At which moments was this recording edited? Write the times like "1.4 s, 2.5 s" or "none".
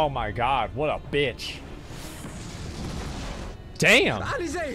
3.5 s